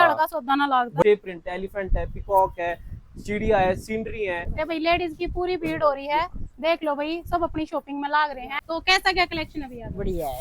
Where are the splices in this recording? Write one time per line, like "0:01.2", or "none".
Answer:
0:01.0
0:04.5
0:08.5